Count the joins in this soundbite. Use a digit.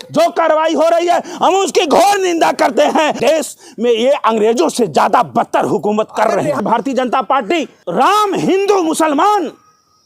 3